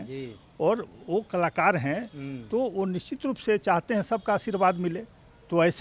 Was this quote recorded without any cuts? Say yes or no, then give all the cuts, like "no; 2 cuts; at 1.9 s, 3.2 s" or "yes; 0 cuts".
yes; 0 cuts